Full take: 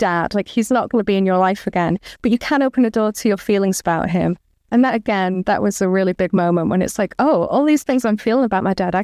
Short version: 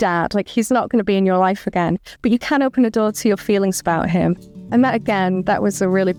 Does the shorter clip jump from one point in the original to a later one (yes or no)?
no